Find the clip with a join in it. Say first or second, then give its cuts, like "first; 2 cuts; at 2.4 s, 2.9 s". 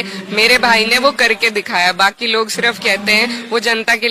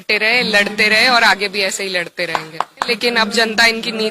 second; 1 cut; at 2.9 s